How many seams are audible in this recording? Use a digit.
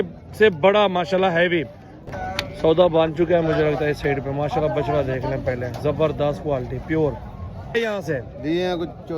2